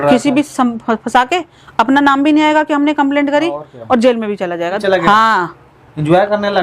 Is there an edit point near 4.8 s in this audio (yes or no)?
yes